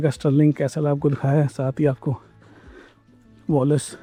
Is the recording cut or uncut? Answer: uncut